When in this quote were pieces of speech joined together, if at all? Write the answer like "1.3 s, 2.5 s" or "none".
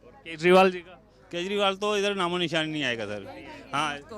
none